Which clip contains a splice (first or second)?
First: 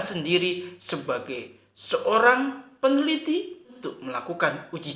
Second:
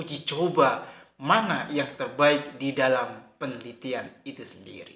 first